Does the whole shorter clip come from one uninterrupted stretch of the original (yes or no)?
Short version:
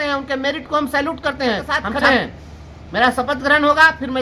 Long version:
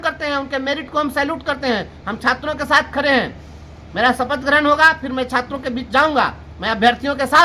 no